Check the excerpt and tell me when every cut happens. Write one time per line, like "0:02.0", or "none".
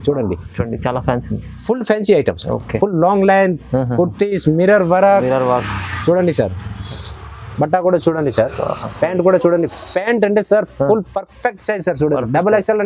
none